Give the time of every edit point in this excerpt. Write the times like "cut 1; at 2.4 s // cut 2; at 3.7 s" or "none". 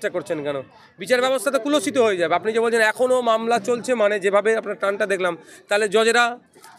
none

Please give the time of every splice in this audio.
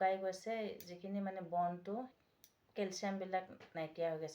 cut 1; at 2.1 s

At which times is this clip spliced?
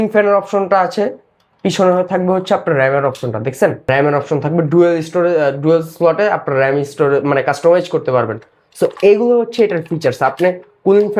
none

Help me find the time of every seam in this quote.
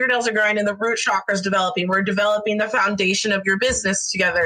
none

